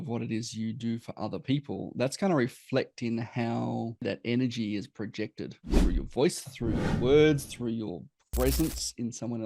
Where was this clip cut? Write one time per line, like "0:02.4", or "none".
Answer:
0:04.0
0:05.7